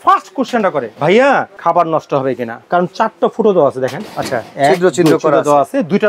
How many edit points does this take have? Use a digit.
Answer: 3